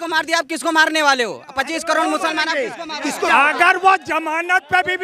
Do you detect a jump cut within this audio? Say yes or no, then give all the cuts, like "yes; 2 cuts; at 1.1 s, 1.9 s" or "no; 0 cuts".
yes; 1 cut; at 3.3 s